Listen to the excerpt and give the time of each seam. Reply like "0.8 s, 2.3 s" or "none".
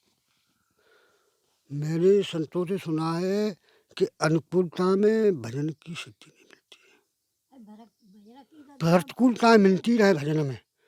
none

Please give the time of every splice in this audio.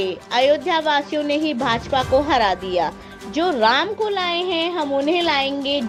none

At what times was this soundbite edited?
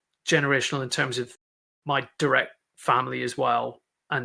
none

